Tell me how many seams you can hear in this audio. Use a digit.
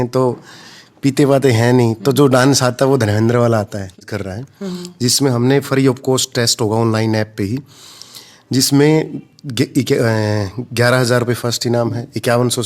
1